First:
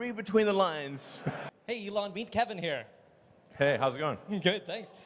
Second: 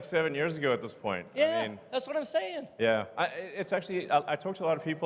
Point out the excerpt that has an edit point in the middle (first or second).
first